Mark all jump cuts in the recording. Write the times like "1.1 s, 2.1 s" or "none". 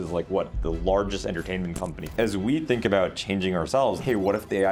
2.0 s, 4.0 s